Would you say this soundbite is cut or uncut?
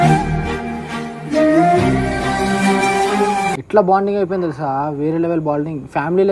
cut